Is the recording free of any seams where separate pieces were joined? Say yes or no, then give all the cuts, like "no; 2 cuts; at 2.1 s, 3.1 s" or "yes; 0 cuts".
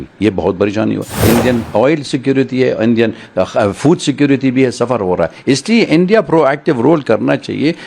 no; 1 cut; at 1.2 s